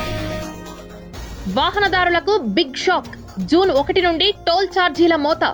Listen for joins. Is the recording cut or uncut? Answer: uncut